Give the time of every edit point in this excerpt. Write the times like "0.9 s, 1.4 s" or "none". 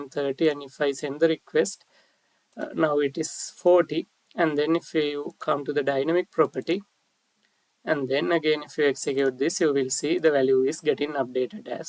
none